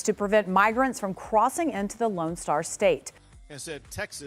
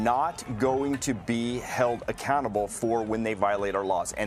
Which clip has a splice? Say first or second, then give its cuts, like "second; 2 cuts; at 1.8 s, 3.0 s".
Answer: first; 1 cut; at 3.1 s